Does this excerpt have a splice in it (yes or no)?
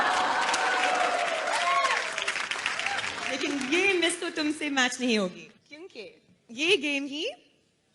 no